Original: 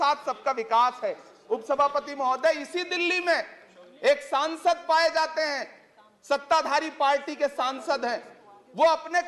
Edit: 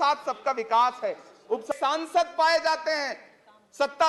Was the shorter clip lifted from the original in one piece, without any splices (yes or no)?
no